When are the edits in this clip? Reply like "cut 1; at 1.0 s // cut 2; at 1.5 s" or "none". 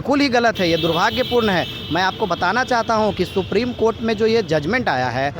none